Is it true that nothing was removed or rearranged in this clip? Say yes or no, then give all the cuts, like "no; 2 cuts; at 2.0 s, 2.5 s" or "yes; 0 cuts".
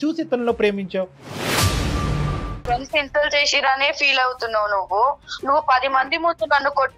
no; 1 cut; at 2.5 s